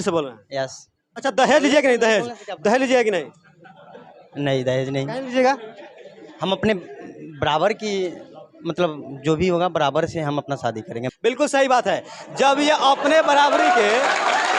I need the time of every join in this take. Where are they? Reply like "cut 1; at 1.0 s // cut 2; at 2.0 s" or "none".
cut 1; at 1.0 s // cut 2; at 11.1 s